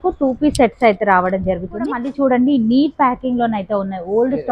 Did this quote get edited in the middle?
yes; 1 cut; at 2.1 s

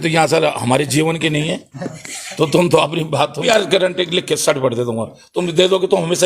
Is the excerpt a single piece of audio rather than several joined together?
no; 1 cut; at 3.4 s

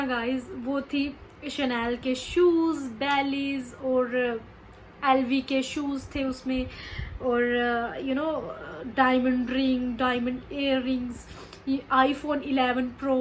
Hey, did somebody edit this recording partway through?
no; 0 cuts

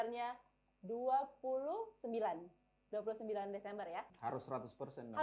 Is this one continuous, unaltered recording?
no; 1 cut; at 4.1 s

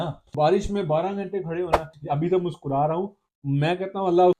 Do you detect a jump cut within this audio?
yes; 1 cut; at 1.9 s

